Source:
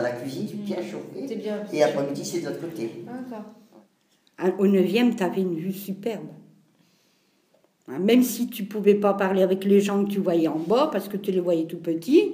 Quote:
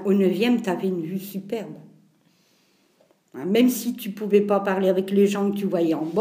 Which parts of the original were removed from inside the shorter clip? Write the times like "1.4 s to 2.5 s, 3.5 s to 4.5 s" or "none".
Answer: none